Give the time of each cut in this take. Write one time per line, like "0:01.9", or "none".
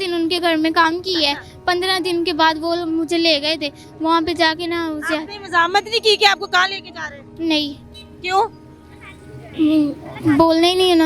none